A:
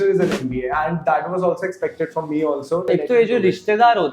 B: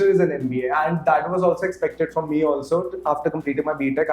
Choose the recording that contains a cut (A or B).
A